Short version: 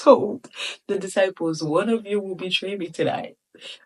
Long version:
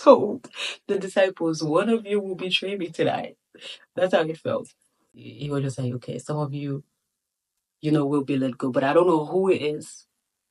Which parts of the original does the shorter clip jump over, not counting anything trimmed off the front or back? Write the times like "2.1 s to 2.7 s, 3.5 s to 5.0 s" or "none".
none

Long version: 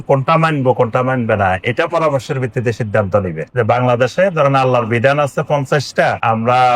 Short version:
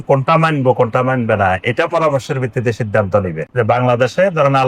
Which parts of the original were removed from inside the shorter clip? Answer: none

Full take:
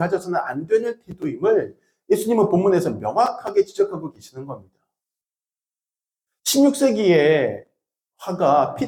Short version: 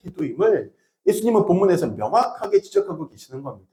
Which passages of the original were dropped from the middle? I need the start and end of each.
none

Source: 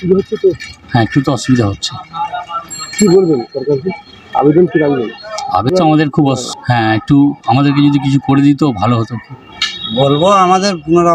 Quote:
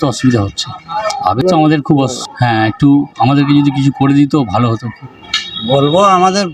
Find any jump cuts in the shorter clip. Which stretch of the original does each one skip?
2.2 s to 5.2 s

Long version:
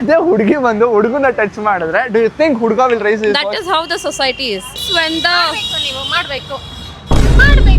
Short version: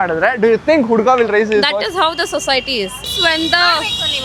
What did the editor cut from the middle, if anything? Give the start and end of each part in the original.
none

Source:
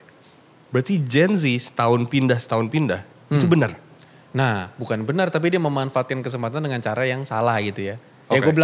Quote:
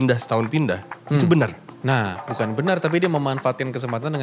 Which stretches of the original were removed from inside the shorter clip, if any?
3.9 s to 4.2 s

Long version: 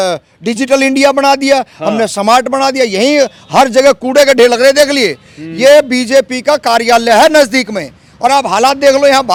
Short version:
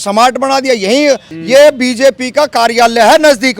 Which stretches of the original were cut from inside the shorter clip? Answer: 3.4 s to 5.4 s

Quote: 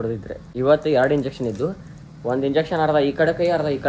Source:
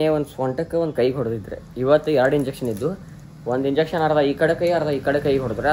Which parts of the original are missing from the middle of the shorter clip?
none

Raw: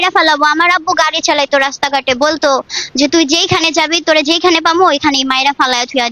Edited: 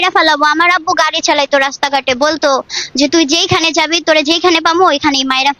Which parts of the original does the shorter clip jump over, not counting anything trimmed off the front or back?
none

